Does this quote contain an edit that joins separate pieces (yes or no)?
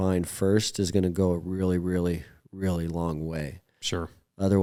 no